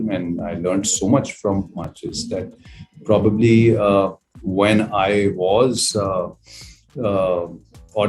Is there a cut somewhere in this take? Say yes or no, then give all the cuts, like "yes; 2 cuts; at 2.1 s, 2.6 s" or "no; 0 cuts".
no; 0 cuts